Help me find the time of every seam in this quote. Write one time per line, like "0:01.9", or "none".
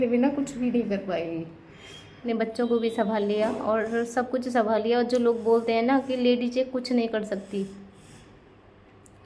0:02.2